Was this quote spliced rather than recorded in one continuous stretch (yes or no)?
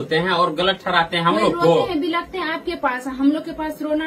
no